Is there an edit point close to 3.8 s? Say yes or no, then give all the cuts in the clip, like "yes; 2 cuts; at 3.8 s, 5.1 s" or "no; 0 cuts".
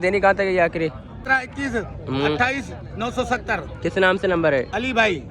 no; 1 cut; at 1.2 s